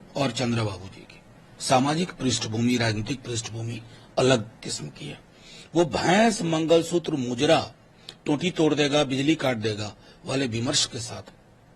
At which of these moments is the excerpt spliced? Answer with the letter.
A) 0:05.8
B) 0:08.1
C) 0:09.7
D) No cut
D